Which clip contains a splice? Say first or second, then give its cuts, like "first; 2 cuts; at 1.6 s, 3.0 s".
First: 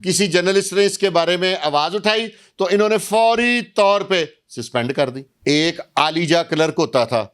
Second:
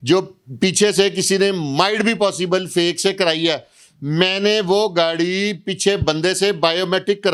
first; 1 cut; at 5.3 s